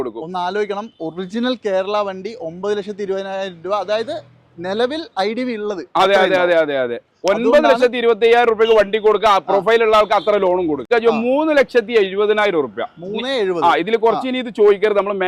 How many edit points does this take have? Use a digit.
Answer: 1